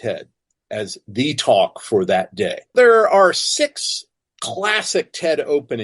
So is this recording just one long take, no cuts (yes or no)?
no